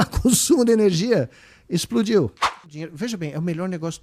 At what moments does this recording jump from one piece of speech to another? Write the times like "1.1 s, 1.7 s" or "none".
2.6 s

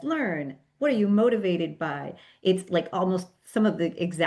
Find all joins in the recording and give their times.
none

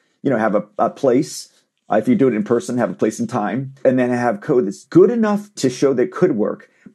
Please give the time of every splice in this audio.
5.5 s

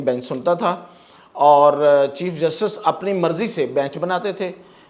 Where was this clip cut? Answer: none

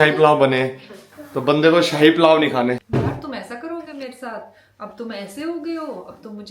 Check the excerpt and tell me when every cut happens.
2.8 s

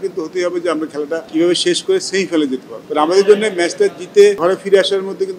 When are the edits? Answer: 1.2 s, 2.7 s, 4.4 s

